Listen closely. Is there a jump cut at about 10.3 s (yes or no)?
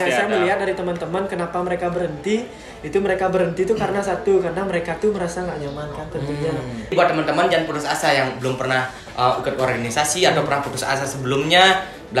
no